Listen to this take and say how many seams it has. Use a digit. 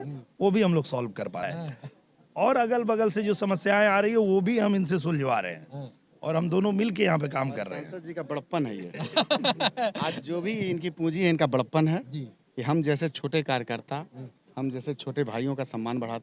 1